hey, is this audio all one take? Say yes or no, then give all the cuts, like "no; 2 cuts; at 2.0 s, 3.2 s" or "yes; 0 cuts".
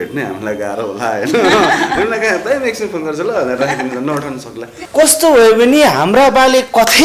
no; 1 cut; at 4.7 s